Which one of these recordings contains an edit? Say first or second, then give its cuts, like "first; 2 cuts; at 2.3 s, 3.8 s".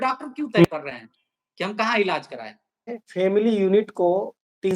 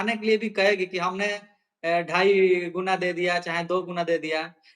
first; 1 cut; at 3.0 s